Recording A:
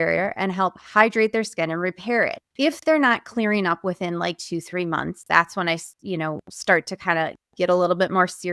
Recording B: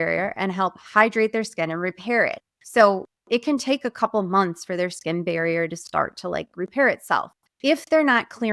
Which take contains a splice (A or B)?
A